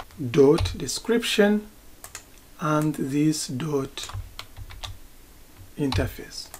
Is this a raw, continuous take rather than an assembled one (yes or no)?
yes